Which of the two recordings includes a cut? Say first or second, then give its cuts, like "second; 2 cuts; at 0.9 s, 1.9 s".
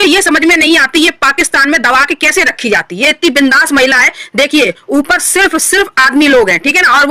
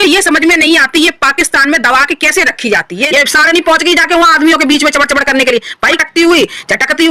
second; 2 cuts; at 3.0 s, 6.0 s